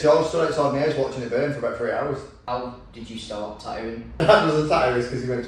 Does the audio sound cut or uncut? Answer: cut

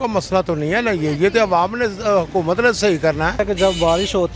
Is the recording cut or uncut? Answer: cut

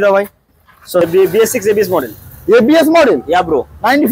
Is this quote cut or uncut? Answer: cut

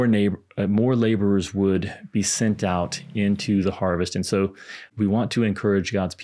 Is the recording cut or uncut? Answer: cut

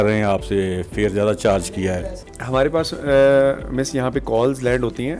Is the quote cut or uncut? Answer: cut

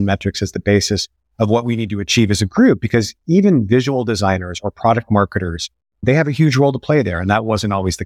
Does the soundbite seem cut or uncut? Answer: uncut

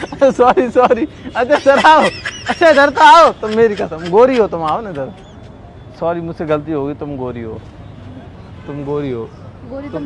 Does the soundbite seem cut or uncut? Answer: uncut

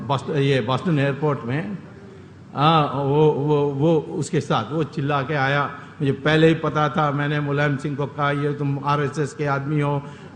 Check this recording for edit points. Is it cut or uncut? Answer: uncut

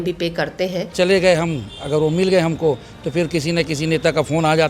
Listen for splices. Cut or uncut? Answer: cut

